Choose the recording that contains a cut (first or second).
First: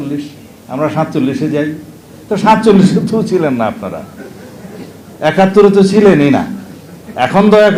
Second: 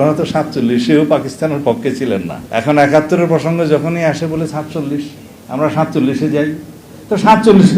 second